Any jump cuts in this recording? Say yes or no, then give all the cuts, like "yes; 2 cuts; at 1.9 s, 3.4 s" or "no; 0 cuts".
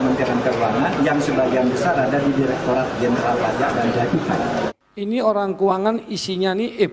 yes; 1 cut; at 4.7 s